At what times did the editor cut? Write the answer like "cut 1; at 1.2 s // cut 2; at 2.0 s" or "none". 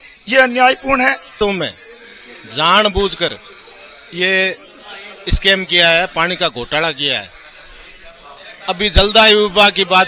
cut 1; at 1.3 s

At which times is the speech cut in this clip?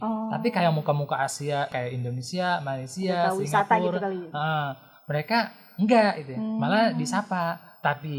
none

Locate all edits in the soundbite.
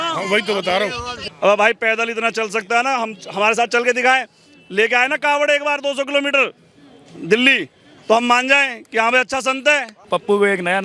cut 1; at 1.1 s // cut 2; at 9.9 s

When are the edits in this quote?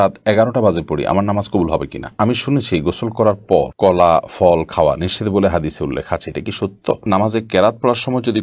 cut 1; at 2.4 s // cut 2; at 7.1 s

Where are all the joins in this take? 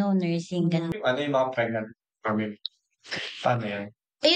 cut 1; at 0.9 s

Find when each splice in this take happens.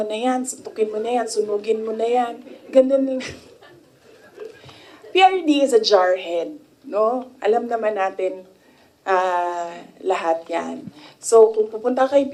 none

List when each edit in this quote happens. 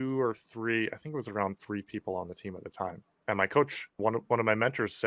cut 1; at 3.1 s

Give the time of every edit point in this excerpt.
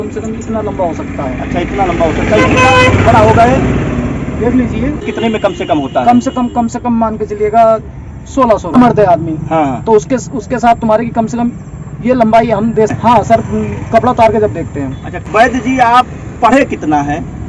cut 1; at 5.1 s // cut 2; at 8.7 s // cut 3; at 13.0 s // cut 4; at 15.2 s

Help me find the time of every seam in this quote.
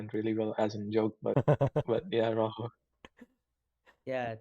cut 1; at 1.2 s

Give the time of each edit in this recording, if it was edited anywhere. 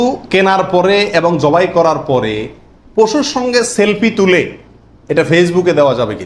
none

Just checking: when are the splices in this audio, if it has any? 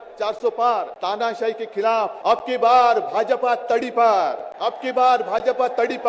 cut 1; at 0.9 s // cut 2; at 2.2 s // cut 3; at 4.5 s

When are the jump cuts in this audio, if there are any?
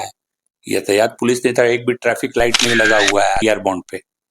cut 1; at 3.4 s

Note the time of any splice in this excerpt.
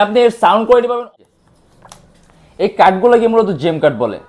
cut 1; at 1.0 s

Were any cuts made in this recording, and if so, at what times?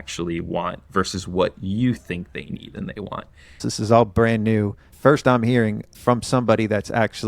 cut 1; at 3.6 s // cut 2; at 4.9 s // cut 3; at 5.9 s

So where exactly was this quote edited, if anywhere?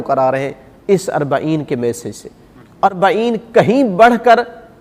cut 1; at 2.8 s

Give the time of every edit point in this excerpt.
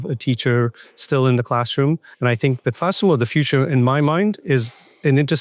cut 1; at 2.1 s

